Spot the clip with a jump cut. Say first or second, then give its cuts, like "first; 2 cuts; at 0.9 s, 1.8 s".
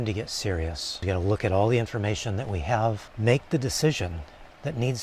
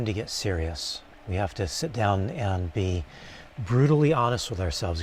first; 2 cuts; at 0.9 s, 3.1 s